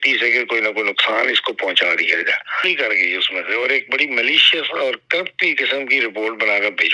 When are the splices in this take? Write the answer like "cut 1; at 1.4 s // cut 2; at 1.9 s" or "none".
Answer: cut 1; at 2.6 s